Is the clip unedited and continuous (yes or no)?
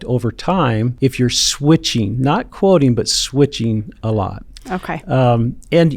no